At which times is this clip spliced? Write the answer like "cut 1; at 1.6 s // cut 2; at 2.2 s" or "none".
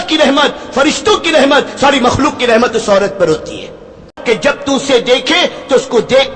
cut 1; at 4.2 s